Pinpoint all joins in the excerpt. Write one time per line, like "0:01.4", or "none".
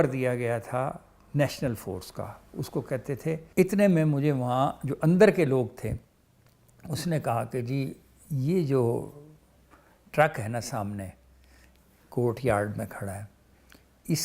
0:03.5